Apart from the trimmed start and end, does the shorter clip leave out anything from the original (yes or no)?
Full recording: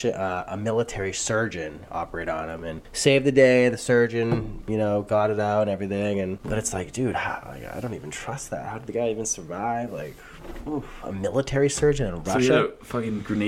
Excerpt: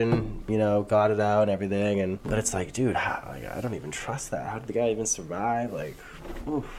no